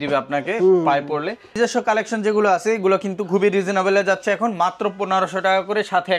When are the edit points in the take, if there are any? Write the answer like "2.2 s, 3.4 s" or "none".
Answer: 1.4 s